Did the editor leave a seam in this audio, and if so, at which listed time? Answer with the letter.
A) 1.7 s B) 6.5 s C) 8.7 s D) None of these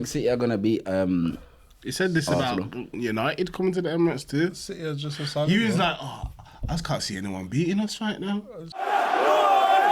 C